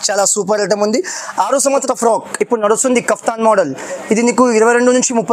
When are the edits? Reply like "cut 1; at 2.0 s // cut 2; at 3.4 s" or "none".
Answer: cut 1; at 1.8 s